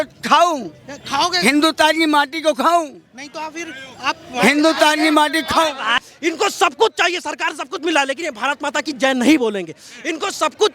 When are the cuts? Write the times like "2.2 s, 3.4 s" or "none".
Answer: 6.0 s